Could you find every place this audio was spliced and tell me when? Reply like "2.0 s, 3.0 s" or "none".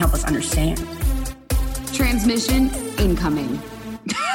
none